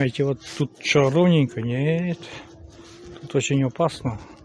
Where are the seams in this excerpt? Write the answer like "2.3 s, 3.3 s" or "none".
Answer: none